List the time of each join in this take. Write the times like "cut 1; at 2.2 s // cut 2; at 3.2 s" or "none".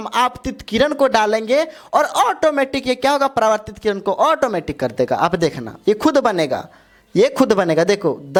none